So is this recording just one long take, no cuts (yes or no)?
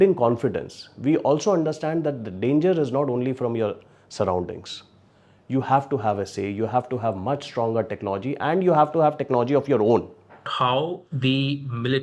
no